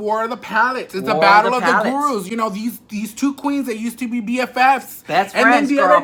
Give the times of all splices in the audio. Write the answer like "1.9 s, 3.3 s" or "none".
none